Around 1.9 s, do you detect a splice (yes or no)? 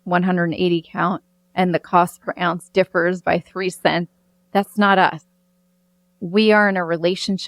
no